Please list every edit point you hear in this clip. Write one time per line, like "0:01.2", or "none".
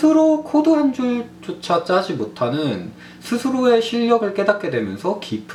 none

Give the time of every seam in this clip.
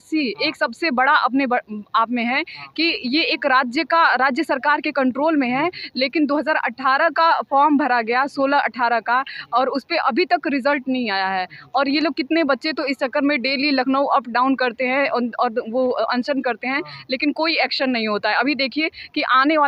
none

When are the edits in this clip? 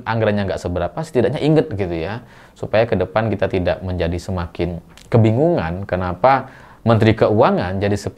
none

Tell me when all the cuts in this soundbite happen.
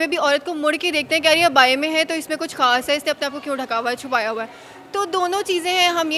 none

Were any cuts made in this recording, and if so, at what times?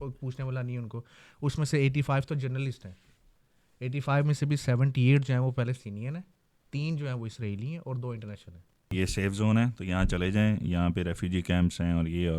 0:08.9

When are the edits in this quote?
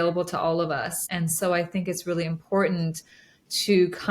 0:01.0

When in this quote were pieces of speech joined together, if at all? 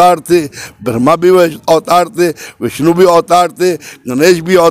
none

